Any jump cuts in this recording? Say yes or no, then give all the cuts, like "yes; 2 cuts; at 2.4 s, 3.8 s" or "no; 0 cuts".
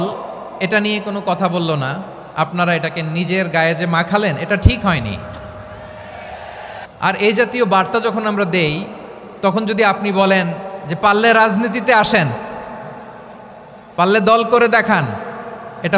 yes; 1 cut; at 6.8 s